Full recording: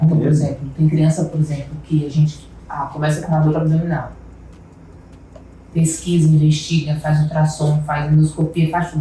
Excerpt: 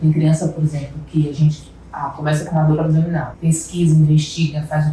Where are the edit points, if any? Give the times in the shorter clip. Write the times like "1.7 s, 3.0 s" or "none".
3.3 s